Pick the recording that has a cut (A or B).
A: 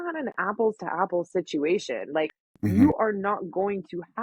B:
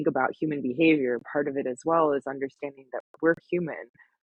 A